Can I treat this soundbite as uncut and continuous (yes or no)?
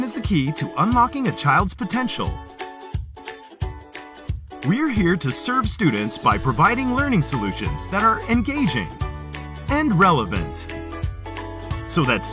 no